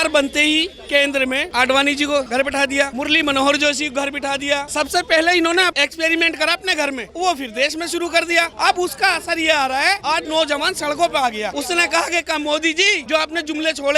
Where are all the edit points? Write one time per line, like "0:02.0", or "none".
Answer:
0:01.5
0:02.4
0:04.7
0:05.7
0:07.1
0:08.5
0:10.0
0:11.5
0:13.0